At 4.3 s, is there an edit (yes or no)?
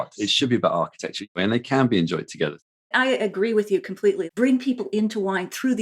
yes